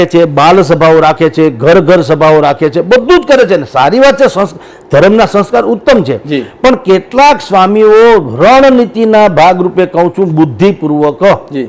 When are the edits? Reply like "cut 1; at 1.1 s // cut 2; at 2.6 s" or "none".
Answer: none